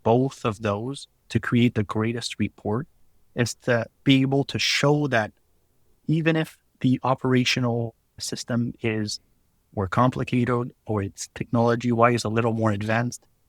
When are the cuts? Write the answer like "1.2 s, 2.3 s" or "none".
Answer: 6.6 s, 8.2 s

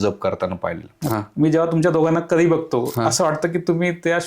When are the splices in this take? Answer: 1.0 s

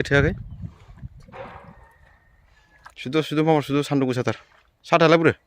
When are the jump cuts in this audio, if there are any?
3.0 s

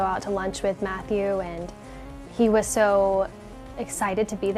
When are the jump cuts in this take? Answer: none

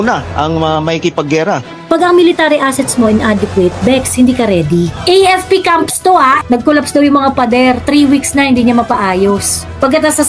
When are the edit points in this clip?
1.7 s, 4.9 s, 6.4 s

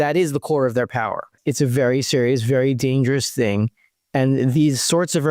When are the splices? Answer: 1.3 s

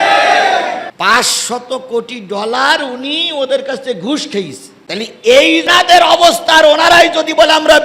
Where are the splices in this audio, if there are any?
0.9 s, 5.7 s

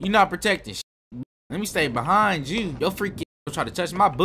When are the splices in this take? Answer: 1.4 s, 2.7 s

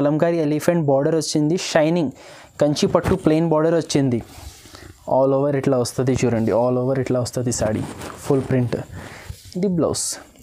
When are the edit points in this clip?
none

